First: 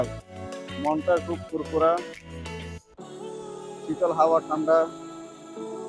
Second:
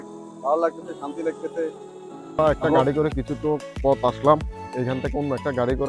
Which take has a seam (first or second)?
second